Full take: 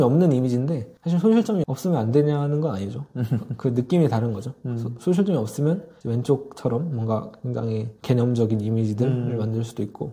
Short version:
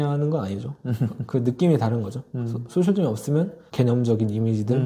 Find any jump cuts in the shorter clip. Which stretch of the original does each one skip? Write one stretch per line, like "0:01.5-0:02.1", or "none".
0:05.9-0:07.9